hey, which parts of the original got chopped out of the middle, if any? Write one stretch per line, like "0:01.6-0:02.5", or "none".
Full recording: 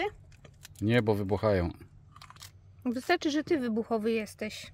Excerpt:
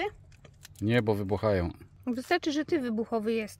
0:01.9-0:02.6